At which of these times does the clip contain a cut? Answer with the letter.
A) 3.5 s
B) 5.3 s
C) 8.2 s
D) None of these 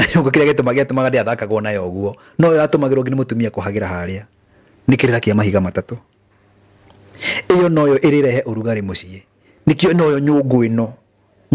D